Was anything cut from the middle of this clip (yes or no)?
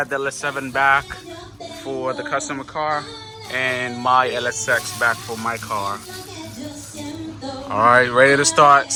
no